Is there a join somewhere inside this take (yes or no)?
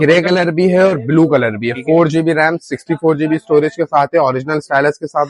no